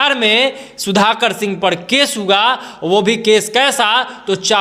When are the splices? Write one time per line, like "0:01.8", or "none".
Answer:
none